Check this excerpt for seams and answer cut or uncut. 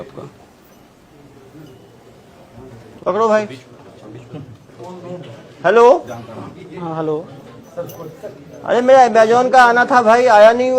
cut